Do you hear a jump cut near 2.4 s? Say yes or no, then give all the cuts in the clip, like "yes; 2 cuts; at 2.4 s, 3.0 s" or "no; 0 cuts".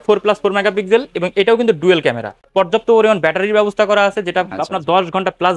yes; 1 cut; at 2.4 s